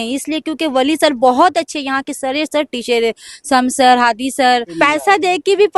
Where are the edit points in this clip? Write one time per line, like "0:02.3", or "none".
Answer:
0:04.7